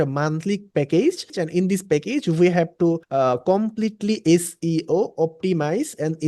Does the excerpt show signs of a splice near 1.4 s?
yes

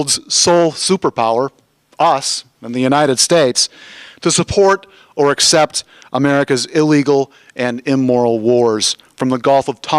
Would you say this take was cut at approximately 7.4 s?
yes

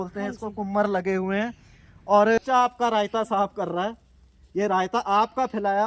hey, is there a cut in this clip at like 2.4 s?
yes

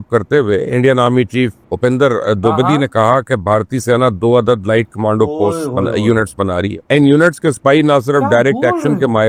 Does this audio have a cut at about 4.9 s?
no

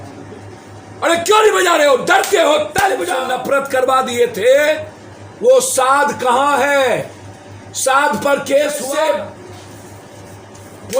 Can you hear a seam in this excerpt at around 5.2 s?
no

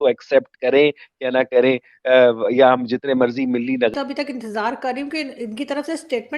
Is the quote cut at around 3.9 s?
yes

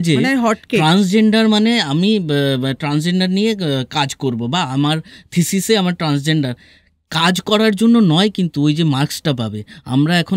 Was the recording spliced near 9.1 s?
no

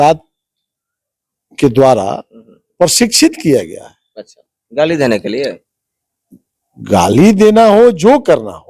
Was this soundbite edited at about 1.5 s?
no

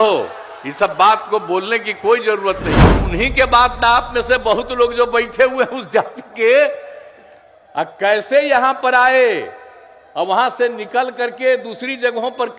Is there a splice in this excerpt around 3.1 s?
yes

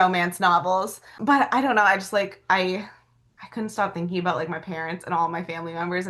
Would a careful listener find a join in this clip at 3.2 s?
no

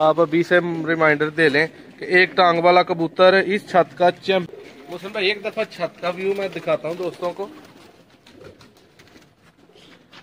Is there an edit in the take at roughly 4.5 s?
yes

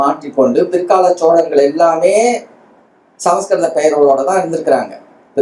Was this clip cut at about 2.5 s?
no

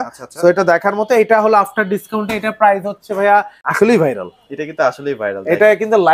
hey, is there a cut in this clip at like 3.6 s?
yes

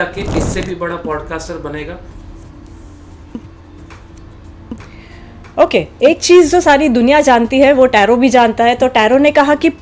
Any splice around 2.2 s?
yes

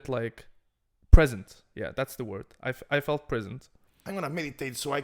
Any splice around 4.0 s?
yes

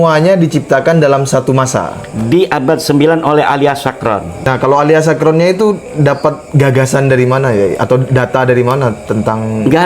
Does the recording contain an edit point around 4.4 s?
yes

